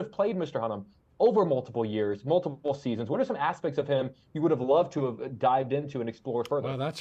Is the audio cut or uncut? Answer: uncut